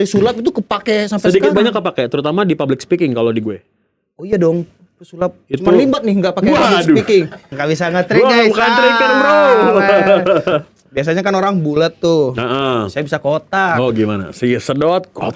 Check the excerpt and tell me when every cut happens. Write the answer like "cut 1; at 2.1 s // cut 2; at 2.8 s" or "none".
cut 1; at 7.5 s